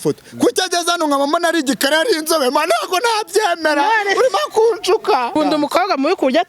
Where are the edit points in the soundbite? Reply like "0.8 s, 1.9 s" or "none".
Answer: 5.3 s